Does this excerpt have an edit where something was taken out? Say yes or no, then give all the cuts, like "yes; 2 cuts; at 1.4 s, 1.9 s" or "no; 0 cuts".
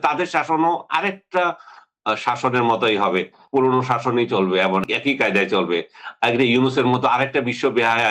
yes; 2 cuts; at 3.4 s, 4.9 s